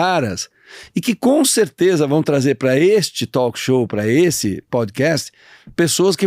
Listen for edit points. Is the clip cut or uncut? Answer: uncut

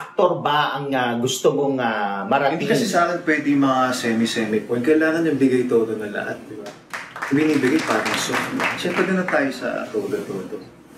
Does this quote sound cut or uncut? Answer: uncut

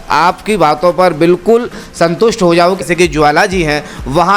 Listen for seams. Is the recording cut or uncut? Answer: cut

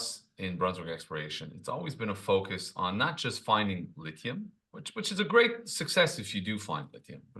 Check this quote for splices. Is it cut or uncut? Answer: uncut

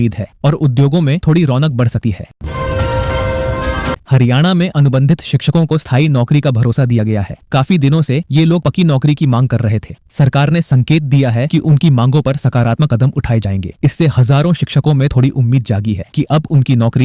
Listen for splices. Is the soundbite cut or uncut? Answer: cut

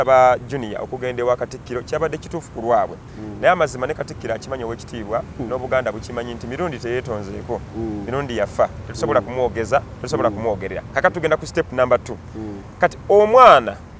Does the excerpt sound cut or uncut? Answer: uncut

